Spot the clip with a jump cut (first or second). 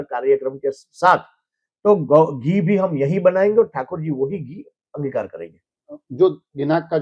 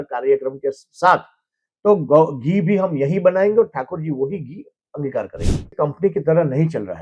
second